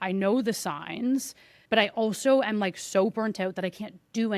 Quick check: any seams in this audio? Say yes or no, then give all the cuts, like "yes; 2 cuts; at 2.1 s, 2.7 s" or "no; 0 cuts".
no; 0 cuts